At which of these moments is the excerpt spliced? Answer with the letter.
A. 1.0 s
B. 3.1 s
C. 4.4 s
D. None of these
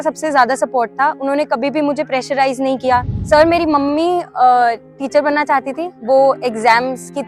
B